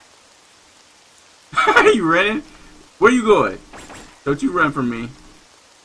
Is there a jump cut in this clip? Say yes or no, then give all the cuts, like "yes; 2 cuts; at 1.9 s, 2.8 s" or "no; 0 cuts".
no; 0 cuts